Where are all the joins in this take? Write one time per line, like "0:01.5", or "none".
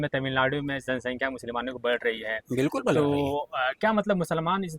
none